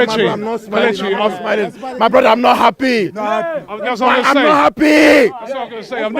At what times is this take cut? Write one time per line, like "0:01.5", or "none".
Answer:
0:01.4

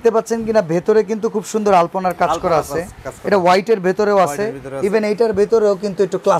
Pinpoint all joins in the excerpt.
none

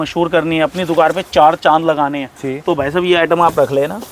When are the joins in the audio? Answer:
none

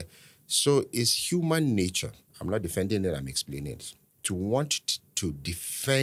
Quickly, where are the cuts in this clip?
none

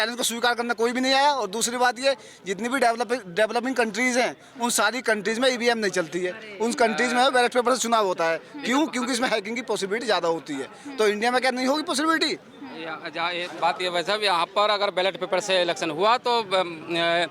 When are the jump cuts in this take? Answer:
none

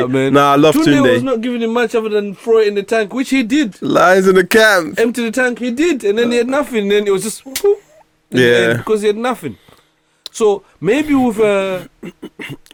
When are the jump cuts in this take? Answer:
none

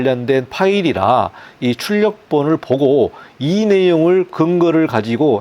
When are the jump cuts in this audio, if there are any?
none

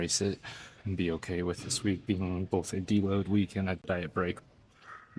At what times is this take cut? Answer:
0:03.9

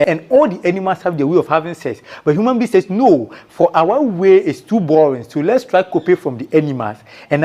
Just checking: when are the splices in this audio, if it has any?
none

